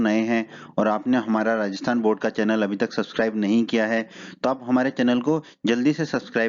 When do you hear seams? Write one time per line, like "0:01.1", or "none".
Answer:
0:02.5